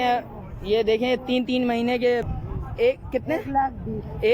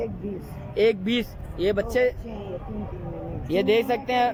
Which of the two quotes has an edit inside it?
first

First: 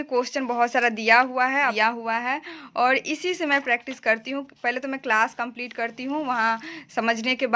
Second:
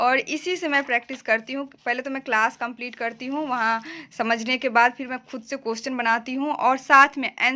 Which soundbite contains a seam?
first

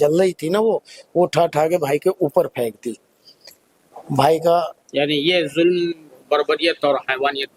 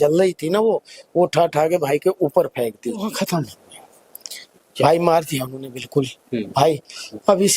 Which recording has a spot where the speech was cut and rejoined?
second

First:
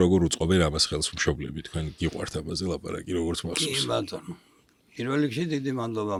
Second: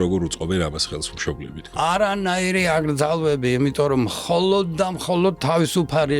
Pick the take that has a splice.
second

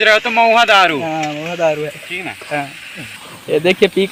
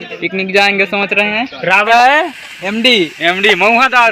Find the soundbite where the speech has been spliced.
second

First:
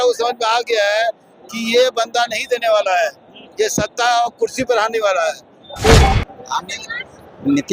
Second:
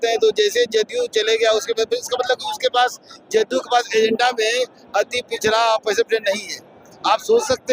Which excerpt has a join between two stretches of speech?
first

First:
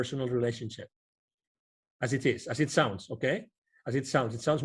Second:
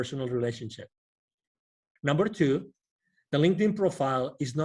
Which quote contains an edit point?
second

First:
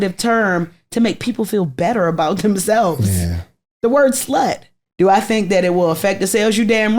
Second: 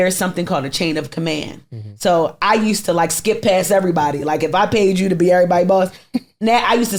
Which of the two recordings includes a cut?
first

